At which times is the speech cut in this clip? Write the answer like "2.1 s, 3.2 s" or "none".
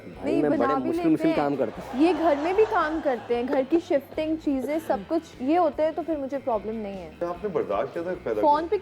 7.1 s